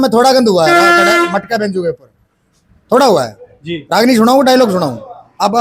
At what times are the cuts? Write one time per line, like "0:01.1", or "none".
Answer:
none

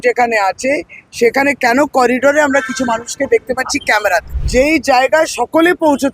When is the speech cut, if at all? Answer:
0:04.4

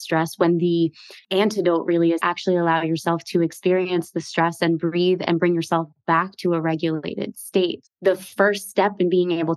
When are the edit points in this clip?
0:07.8

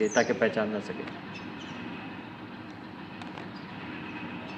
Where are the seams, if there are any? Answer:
none

